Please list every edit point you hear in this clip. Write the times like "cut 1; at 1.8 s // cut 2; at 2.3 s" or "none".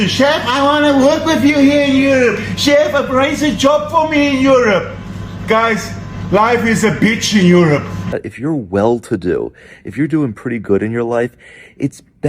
cut 1; at 8.2 s